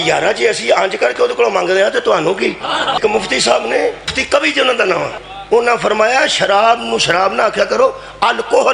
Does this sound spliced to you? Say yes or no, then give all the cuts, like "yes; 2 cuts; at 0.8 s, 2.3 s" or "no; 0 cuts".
yes; 3 cuts; at 3.0 s, 4.2 s, 5.1 s